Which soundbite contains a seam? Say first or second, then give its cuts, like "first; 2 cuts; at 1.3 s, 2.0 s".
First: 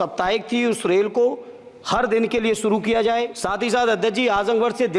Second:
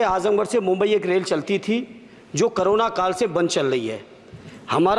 first; 1 cut; at 3.4 s